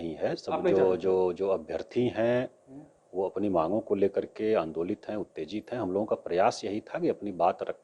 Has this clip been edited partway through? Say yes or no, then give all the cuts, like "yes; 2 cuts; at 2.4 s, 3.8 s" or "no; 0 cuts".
no; 0 cuts